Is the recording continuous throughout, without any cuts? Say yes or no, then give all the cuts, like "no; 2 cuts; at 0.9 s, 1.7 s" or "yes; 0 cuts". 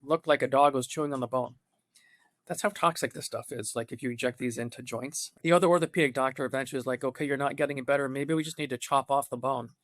no; 1 cut; at 5.2 s